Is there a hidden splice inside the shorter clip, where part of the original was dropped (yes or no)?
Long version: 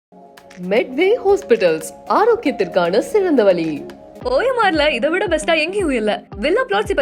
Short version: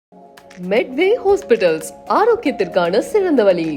no